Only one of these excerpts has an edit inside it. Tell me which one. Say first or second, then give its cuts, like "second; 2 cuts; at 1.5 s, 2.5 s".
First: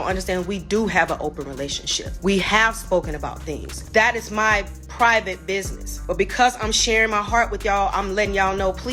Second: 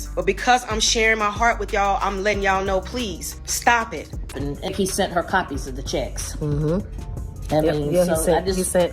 second; 1 cut; at 4.2 s